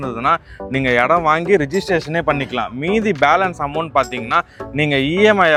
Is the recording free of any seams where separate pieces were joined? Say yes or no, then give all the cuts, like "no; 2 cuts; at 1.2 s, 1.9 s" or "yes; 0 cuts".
yes; 0 cuts